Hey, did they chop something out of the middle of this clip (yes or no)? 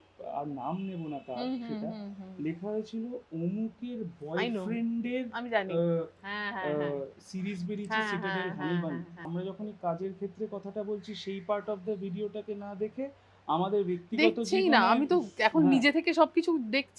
yes